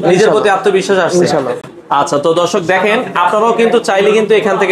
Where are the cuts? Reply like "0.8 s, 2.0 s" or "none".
none